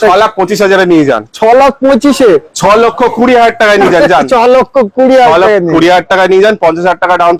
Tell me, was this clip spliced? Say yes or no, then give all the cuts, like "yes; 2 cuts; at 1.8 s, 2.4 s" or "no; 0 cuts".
no; 0 cuts